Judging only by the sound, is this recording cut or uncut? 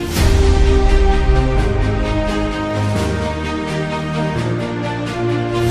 uncut